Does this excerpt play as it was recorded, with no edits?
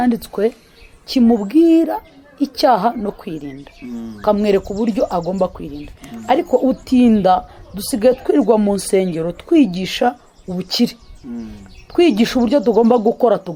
yes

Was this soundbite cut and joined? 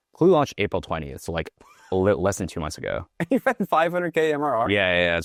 no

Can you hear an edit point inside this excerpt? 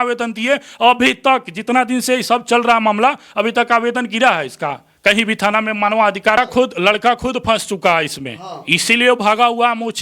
yes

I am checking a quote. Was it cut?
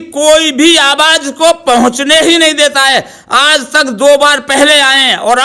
no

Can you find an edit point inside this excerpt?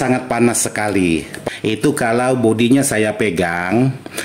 yes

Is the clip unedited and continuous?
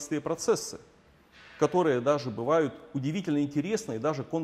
yes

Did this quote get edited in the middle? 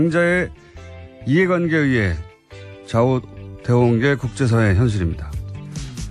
yes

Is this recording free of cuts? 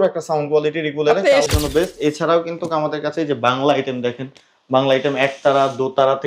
no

